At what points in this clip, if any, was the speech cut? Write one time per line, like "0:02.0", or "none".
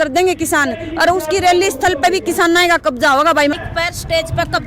0:03.5